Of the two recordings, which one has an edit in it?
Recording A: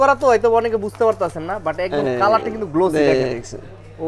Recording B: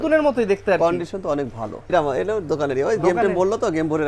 B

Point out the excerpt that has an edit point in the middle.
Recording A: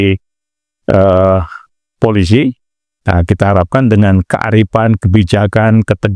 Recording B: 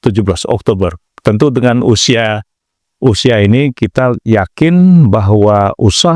B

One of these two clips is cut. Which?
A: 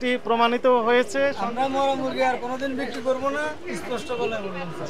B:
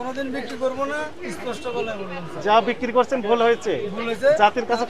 A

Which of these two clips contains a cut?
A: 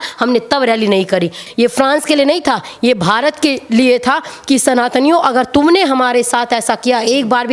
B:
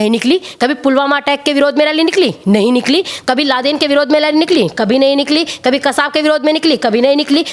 A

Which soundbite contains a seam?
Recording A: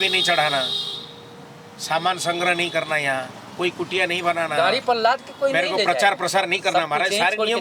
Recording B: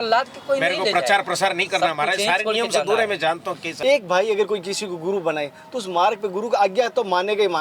B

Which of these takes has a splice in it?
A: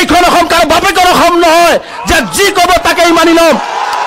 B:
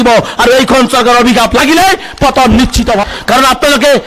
B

